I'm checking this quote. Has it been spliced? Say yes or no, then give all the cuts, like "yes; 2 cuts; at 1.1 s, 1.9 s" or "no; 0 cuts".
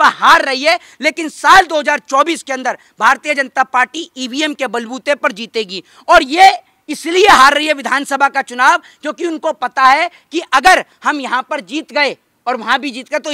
no; 0 cuts